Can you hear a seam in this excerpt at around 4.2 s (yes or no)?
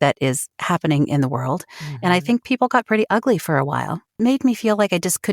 yes